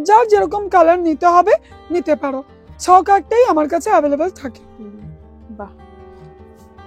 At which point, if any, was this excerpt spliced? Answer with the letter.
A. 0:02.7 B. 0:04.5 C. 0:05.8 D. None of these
D